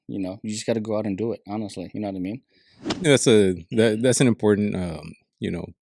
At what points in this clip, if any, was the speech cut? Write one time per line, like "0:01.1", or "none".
0:03.0